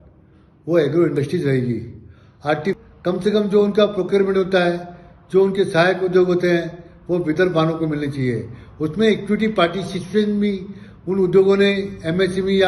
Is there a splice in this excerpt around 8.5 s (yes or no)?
no